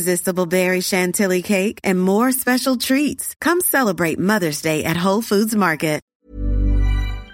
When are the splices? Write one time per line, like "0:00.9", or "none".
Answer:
0:06.1